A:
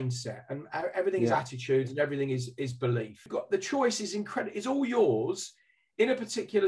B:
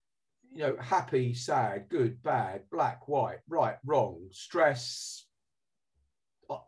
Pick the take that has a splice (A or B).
A